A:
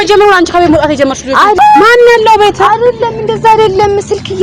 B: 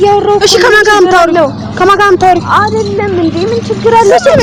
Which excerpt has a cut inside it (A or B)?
A